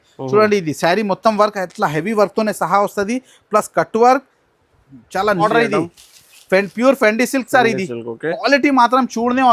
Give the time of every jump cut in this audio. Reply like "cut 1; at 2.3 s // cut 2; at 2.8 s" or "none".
cut 1; at 5.4 s